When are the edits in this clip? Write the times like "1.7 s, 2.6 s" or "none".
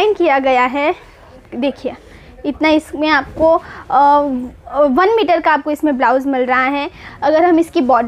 7.0 s